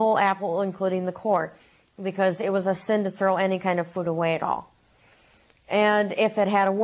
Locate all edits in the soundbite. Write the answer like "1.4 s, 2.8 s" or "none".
1.0 s